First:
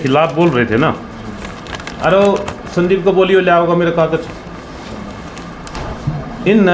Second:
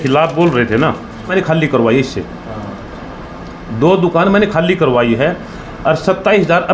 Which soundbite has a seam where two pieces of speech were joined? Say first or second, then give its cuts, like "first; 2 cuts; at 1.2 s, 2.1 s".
second; 1 cut; at 1.3 s